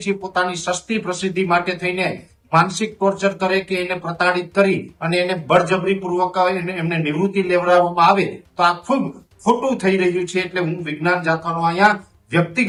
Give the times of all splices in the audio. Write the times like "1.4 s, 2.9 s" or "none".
none